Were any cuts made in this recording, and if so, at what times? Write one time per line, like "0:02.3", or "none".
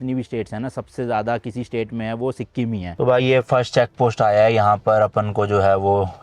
0:02.9